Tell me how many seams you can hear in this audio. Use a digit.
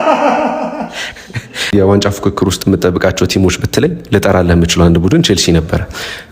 1